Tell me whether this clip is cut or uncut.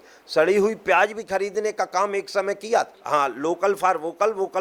cut